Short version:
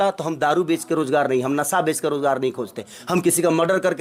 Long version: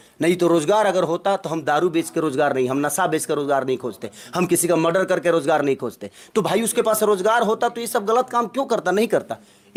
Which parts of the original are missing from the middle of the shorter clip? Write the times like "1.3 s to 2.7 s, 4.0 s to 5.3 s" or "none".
none